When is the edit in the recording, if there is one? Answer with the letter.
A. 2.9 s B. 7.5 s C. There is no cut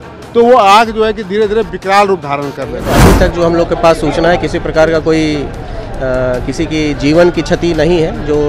A